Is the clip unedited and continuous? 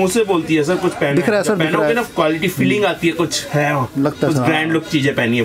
yes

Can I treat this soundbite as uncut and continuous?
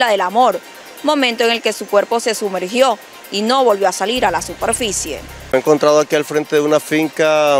no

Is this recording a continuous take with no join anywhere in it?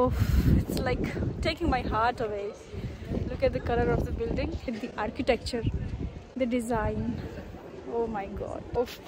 yes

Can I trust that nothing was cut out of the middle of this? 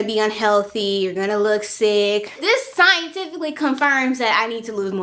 no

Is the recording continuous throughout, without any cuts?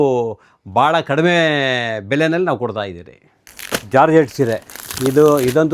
yes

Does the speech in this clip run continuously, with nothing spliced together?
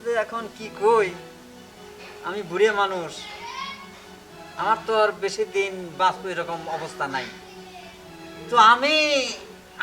yes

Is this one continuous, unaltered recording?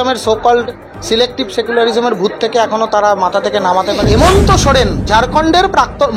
no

